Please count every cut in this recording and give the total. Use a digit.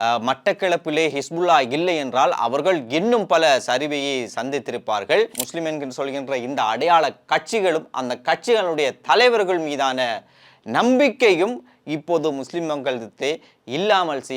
1